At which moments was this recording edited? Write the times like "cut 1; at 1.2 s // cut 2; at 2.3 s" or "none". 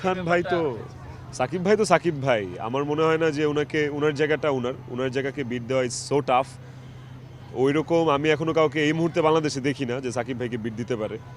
none